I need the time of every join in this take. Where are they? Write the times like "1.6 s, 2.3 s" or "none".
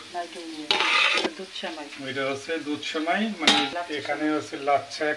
1.3 s, 3.7 s